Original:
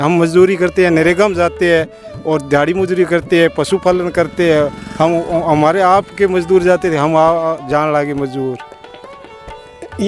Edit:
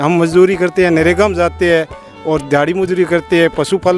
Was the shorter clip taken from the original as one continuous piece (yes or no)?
yes